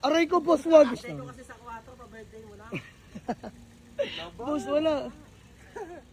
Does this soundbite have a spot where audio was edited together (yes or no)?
yes